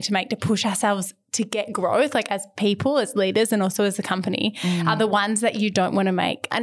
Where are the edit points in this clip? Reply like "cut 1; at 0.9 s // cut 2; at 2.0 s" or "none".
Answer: none